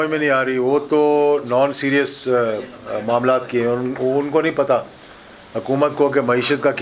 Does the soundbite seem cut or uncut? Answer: uncut